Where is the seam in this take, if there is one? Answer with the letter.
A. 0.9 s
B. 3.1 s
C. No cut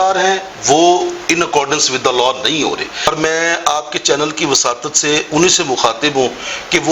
B